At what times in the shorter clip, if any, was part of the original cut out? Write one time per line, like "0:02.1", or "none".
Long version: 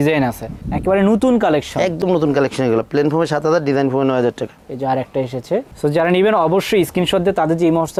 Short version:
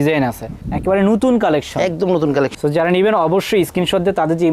0:02.5